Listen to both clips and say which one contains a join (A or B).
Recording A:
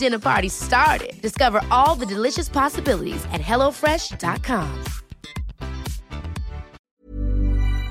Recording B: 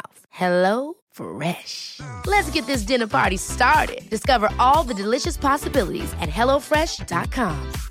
A